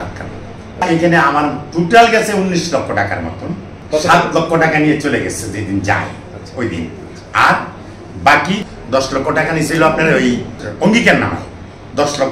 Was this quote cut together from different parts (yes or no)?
yes